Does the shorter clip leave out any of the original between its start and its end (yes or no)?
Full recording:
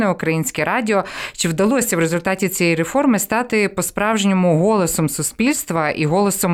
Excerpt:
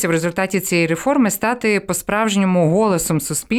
no